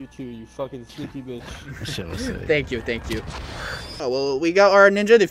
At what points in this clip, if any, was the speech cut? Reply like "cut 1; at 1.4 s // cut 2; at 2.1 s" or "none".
none

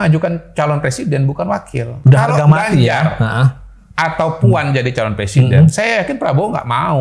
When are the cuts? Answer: cut 1; at 1.9 s

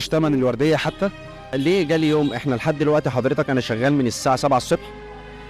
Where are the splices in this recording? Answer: cut 1; at 1.5 s

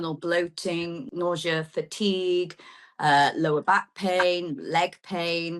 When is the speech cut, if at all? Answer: cut 1; at 1.1 s

